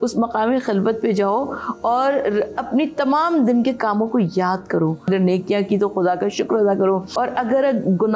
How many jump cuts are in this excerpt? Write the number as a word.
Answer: two